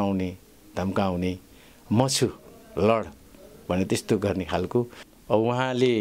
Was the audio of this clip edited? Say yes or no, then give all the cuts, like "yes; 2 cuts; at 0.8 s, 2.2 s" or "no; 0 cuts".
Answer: yes; 1 cut; at 5.0 s